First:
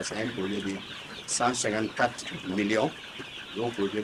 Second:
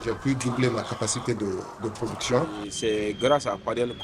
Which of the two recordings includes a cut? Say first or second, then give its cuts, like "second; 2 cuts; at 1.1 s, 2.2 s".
second; 1 cut; at 2.6 s